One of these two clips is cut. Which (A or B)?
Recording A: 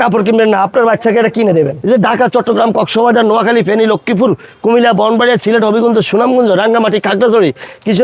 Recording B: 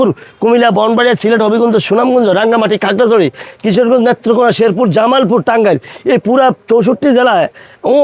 A